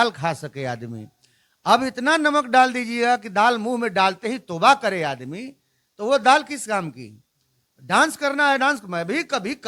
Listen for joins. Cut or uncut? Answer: uncut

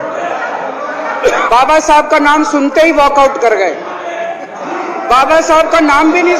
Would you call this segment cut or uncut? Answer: cut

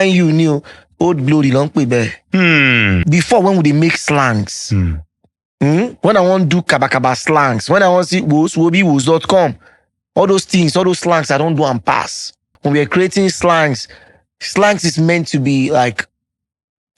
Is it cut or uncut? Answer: cut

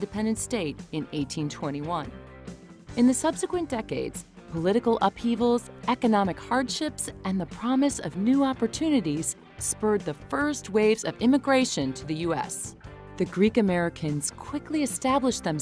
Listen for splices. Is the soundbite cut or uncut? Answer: cut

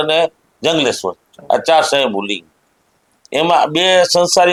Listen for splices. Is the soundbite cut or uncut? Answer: uncut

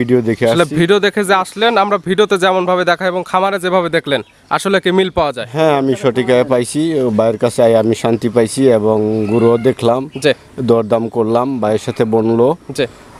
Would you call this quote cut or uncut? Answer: uncut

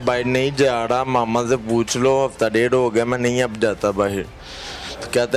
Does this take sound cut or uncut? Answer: uncut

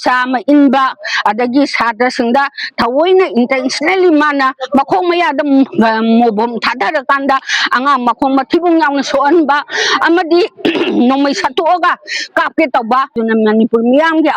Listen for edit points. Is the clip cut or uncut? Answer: cut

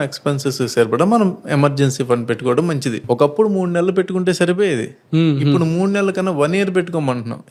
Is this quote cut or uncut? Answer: uncut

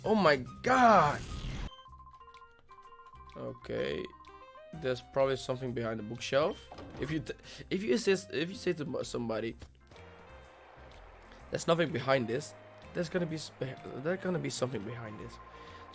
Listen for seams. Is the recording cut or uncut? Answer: uncut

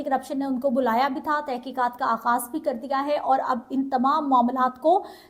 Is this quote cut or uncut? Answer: uncut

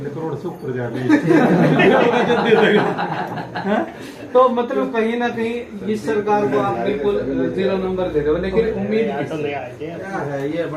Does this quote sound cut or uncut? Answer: uncut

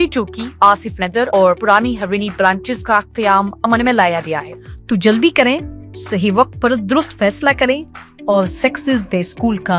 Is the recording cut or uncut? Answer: cut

